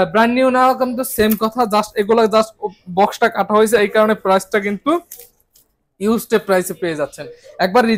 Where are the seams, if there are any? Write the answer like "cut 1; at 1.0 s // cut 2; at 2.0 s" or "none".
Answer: none